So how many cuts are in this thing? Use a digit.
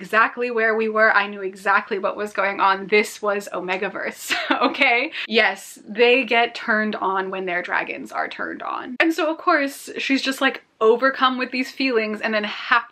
0